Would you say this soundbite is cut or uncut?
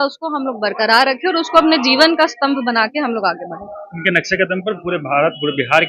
uncut